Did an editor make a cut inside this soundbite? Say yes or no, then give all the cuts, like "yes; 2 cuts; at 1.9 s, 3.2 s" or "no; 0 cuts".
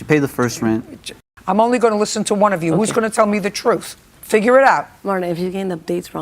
yes; 2 cuts; at 1.1 s, 4.9 s